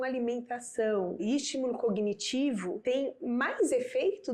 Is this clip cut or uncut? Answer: cut